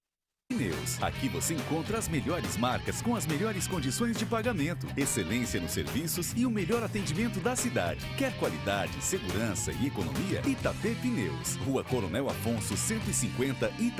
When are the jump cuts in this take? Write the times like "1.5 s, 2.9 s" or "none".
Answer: none